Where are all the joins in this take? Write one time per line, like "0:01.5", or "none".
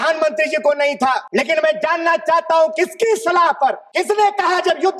0:01.2
0:03.8